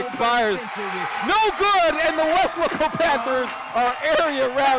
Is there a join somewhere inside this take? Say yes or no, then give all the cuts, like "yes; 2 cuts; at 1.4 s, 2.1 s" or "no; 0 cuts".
no; 0 cuts